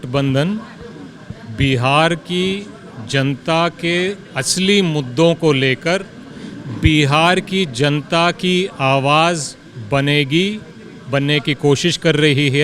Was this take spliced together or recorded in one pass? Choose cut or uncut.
uncut